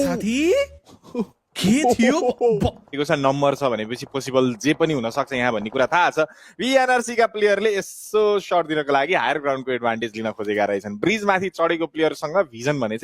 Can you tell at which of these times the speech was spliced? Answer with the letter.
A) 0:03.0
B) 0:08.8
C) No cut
A